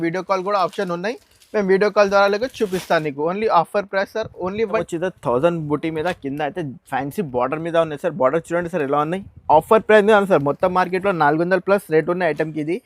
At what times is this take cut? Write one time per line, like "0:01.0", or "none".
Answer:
0:04.8